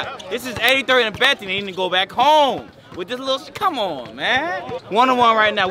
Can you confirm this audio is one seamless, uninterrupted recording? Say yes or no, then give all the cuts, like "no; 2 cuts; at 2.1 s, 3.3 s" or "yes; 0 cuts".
no; 1 cut; at 4.7 s